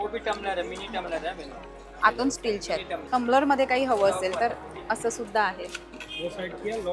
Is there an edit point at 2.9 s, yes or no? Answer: yes